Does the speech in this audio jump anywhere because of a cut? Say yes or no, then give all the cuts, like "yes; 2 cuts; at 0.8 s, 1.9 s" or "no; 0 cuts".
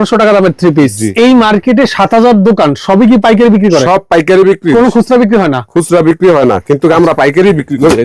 yes; 1 cut; at 1.1 s